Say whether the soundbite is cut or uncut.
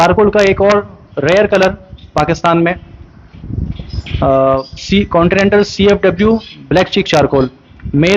uncut